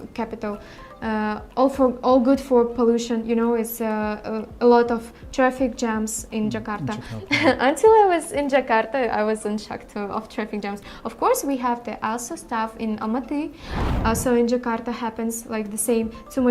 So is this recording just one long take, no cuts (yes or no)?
no